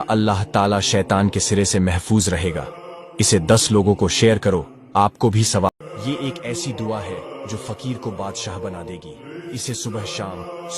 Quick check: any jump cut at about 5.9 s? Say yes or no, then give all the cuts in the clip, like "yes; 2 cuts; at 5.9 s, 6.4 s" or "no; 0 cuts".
yes; 1 cut; at 5.9 s